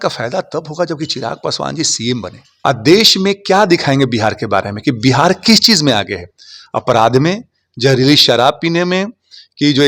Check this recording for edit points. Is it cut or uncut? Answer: cut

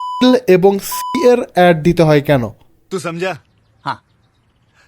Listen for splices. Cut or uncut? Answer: cut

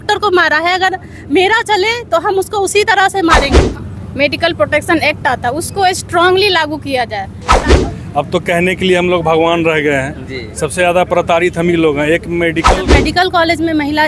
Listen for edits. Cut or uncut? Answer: cut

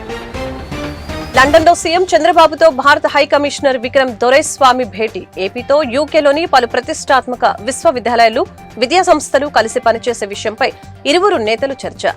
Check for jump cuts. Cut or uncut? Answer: cut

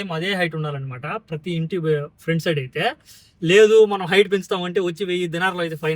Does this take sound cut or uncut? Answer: uncut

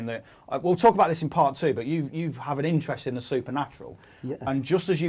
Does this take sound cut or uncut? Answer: cut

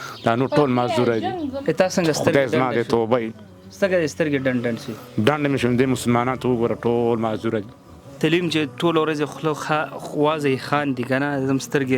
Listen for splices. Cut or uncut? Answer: cut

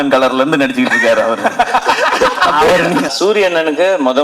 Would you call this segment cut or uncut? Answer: cut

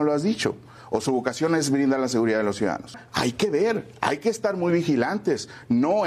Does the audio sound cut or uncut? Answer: cut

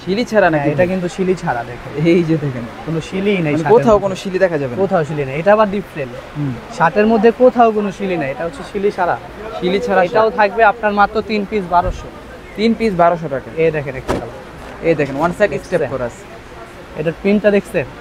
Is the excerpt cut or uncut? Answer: uncut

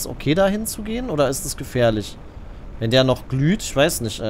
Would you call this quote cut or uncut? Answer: uncut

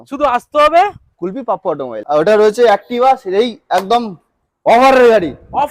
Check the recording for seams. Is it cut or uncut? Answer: cut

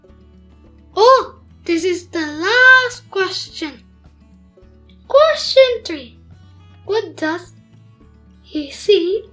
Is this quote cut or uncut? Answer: cut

